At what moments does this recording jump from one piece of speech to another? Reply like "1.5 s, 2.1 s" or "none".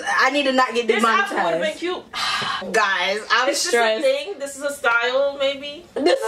2.1 s